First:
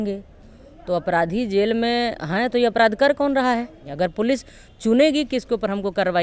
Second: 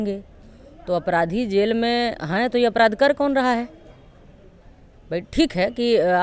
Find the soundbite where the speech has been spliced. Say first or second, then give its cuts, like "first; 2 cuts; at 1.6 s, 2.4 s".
first; 1 cut; at 3.8 s